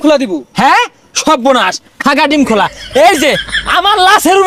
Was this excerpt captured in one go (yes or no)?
yes